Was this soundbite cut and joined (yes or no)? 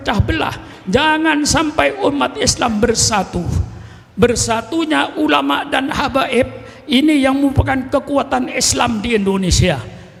no